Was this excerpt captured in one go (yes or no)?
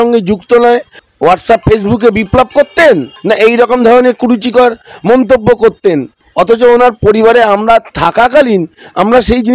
no